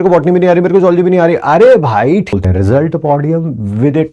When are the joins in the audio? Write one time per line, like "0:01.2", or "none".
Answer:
0:02.3